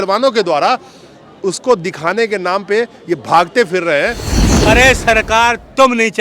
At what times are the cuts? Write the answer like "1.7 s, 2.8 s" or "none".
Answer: 4.4 s